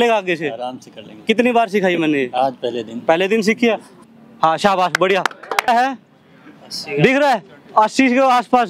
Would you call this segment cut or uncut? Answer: cut